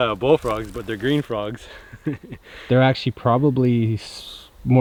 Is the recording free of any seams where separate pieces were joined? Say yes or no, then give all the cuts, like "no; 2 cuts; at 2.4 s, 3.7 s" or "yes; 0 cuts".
yes; 0 cuts